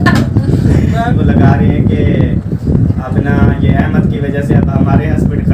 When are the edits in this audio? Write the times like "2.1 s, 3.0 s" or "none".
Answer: 1.0 s